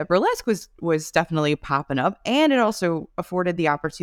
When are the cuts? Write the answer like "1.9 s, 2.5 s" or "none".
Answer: none